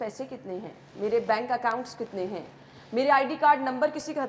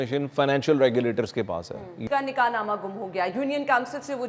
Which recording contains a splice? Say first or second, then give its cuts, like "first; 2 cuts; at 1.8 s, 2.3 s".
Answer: second; 1 cut; at 1.9 s